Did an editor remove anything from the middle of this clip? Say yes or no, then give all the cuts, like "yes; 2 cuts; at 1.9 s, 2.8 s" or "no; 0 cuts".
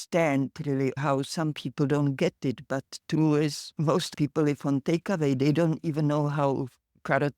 yes; 1 cut; at 1.0 s